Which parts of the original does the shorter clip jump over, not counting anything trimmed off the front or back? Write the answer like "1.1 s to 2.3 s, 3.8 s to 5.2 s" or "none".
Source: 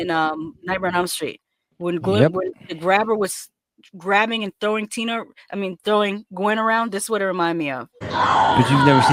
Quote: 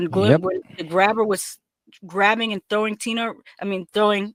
none

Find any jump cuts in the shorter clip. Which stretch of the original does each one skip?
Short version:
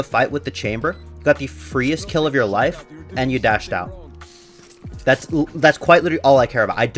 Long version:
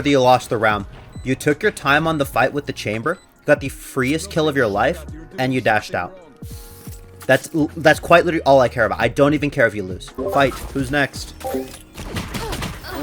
none

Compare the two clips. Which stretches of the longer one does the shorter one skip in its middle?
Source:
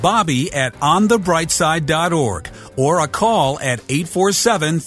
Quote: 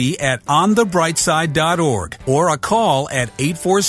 2.5 s to 2.6 s

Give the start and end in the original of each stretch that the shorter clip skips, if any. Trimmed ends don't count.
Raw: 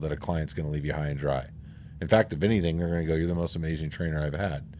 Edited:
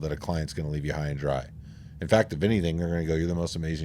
none

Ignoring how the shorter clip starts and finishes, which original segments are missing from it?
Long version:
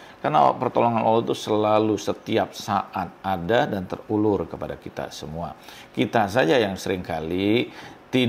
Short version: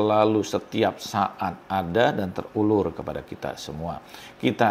none

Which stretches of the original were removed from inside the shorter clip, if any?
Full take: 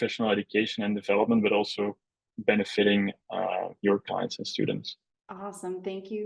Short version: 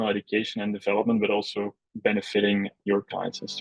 2.0 s to 2.3 s, 3.2 s to 3.7 s

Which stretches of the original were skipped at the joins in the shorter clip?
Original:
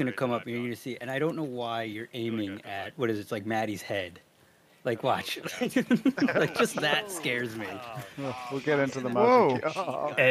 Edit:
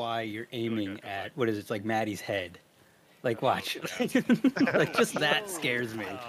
none

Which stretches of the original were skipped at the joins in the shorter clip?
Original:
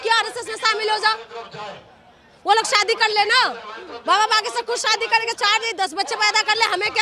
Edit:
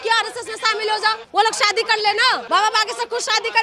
1.2 s to 2.3 s, 3.5 s to 4.0 s

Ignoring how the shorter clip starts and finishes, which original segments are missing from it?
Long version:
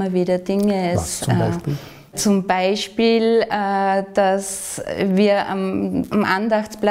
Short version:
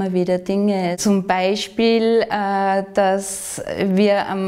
1.0 s to 2.2 s

